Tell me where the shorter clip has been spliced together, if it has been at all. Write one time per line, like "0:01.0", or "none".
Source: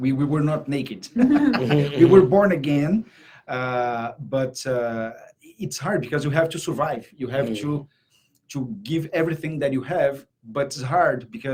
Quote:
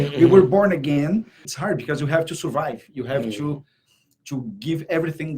0:01.4

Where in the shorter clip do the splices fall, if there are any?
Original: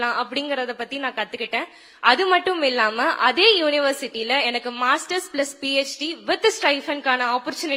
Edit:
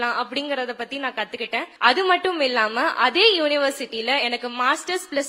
0:01.7

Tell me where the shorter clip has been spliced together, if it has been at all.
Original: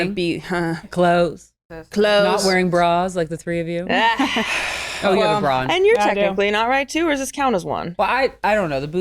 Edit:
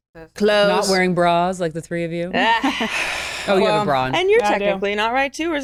none

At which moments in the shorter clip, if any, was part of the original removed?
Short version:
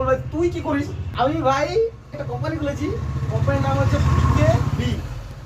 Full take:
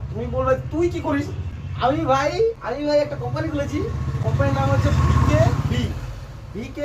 0:01.0
0:02.1

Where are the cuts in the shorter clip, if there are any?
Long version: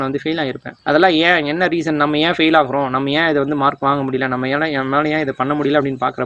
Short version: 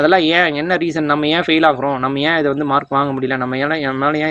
none

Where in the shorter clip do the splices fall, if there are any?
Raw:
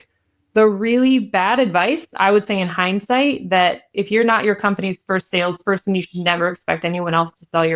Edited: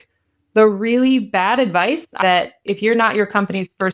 0:02.1

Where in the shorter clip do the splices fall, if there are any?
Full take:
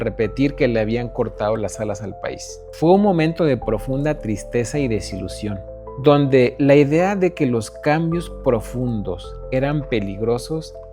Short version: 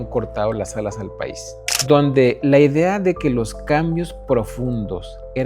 0:01.5

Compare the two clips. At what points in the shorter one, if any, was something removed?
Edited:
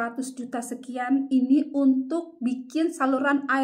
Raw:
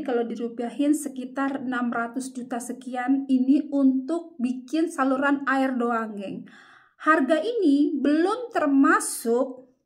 none

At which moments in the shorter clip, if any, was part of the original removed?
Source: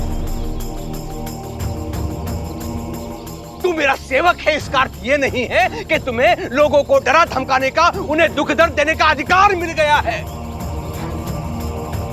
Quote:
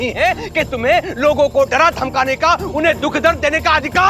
none

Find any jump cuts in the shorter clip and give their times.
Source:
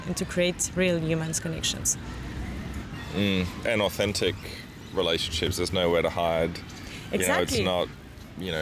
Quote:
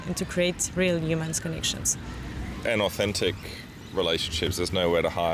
0:02.5

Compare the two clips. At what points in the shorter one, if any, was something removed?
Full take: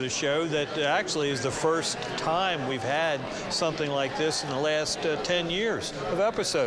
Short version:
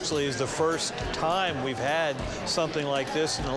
none

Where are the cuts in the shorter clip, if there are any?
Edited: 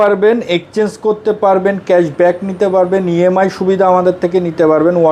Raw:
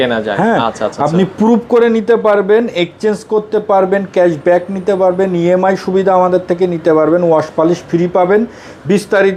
none

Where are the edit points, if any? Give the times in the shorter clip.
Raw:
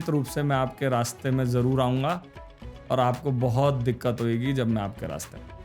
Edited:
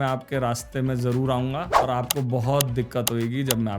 0:01.7

